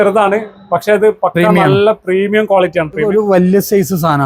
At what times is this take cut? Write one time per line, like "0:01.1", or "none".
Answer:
0:03.0